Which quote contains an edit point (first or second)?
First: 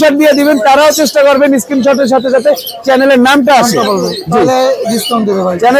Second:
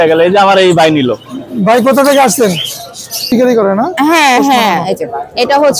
second